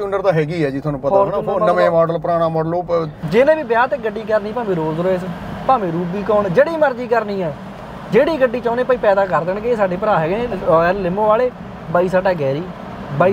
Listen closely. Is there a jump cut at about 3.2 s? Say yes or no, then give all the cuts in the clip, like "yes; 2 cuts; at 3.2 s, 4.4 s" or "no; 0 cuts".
yes; 1 cut; at 3.2 s